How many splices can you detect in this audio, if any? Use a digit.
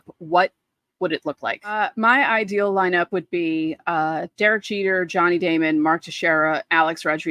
1